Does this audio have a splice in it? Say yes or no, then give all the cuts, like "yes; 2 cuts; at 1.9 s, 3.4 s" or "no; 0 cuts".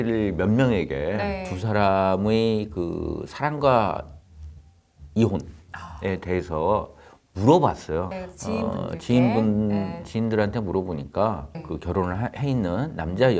no; 0 cuts